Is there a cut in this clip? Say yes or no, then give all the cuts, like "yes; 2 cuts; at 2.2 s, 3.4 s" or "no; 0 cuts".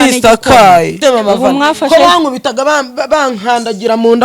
yes; 1 cut; at 1.0 s